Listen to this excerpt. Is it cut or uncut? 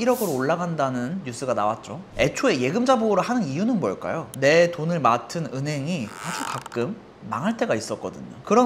cut